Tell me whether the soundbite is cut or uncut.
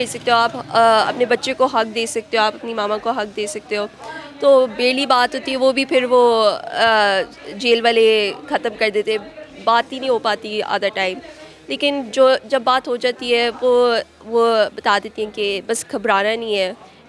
uncut